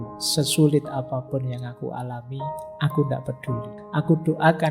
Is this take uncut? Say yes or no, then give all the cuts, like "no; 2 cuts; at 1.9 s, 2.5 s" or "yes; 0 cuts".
no; 1 cut; at 3.8 s